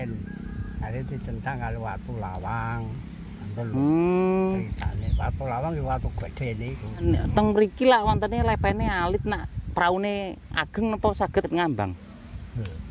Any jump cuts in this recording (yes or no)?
yes